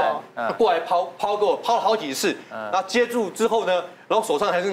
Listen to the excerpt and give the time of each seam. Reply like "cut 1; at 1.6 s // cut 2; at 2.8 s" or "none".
none